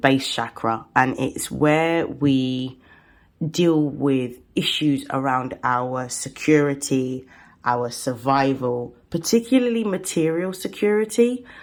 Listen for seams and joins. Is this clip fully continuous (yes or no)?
yes